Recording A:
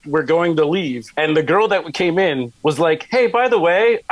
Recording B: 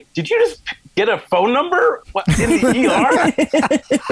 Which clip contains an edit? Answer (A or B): A